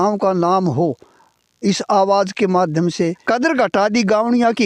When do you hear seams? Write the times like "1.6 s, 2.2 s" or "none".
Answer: 3.2 s